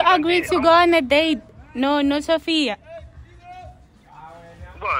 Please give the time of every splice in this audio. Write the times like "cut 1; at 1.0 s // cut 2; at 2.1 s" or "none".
none